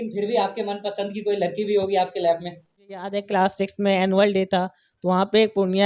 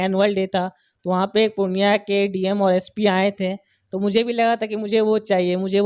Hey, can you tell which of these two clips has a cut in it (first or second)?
first